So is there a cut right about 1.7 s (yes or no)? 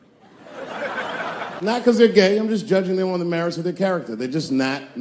yes